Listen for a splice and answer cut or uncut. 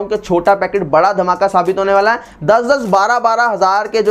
uncut